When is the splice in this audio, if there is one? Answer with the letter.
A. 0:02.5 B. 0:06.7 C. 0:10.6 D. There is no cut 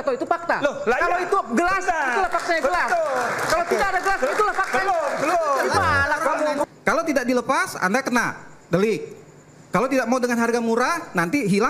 B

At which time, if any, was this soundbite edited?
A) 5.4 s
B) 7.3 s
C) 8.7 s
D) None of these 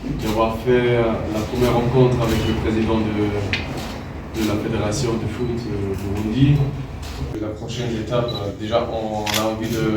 B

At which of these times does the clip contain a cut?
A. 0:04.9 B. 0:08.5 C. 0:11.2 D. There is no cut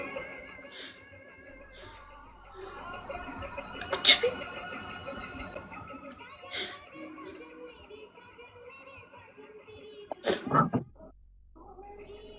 D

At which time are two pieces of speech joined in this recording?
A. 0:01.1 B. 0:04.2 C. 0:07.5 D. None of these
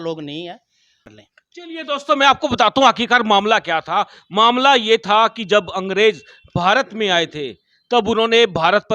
A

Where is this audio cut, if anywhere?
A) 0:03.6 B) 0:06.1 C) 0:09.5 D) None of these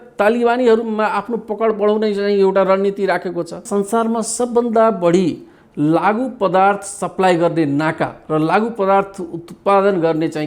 A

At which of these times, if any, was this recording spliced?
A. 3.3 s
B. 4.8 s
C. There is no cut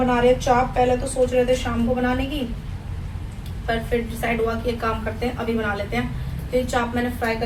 C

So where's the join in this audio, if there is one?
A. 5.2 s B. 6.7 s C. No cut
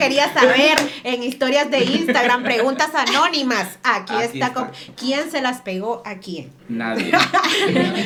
C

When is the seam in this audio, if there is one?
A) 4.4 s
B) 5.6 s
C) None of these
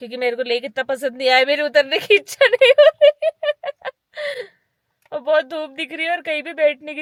C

